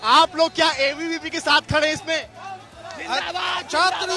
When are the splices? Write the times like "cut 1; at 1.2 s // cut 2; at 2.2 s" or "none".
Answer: none